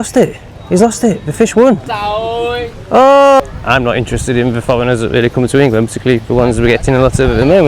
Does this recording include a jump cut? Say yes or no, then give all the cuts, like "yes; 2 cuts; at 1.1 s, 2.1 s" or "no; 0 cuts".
yes; 2 cuts; at 2.0 s, 3.4 s